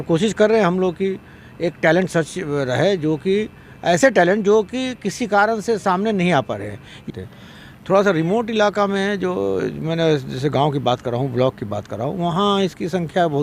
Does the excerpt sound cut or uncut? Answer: cut